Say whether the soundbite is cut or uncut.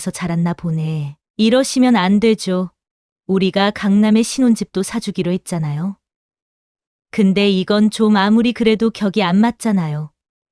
cut